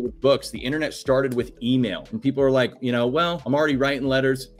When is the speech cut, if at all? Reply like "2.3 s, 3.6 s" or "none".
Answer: 2.1 s, 3.4 s